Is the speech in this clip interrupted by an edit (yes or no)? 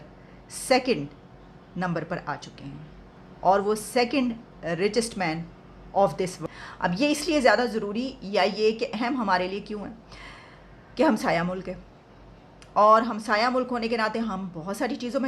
yes